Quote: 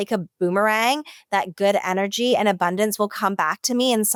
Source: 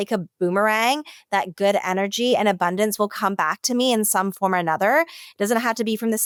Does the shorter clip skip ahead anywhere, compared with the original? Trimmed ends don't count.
no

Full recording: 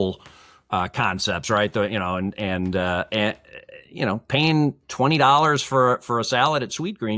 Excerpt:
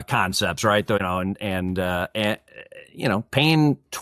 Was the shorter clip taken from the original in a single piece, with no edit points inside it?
no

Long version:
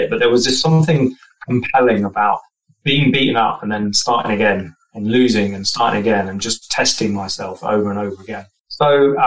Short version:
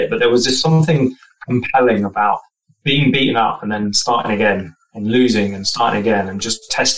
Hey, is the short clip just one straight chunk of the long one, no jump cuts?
yes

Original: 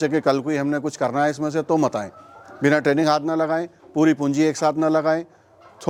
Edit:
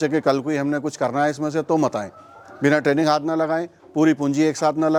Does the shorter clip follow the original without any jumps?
yes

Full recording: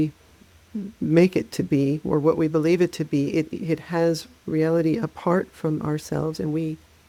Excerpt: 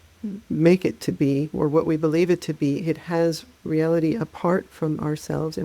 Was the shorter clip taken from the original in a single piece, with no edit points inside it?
no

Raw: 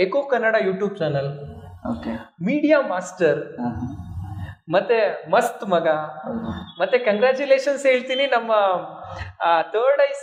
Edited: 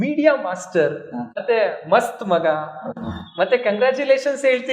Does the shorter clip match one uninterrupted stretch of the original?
no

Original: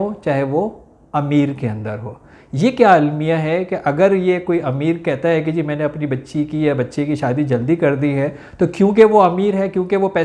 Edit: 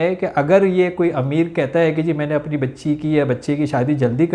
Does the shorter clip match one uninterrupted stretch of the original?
yes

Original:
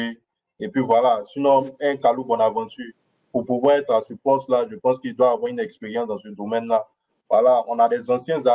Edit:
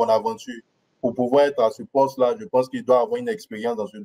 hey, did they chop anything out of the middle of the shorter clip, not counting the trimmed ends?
no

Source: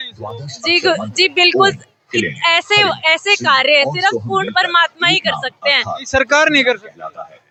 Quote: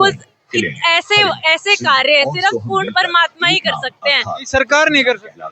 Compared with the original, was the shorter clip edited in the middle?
no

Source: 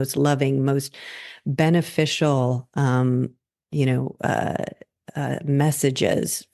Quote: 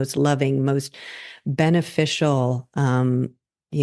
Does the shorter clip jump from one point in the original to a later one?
no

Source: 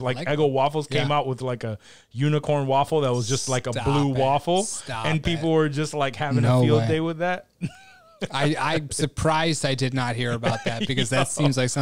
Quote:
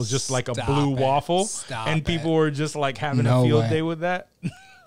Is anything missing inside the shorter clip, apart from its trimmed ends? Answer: no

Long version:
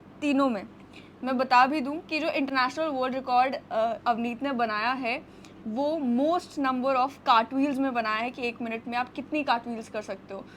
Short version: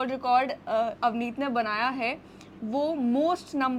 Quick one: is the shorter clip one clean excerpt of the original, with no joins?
yes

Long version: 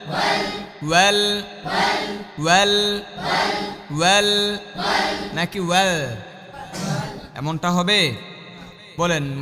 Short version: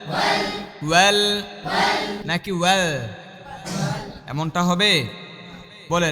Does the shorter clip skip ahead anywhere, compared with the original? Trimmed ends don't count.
yes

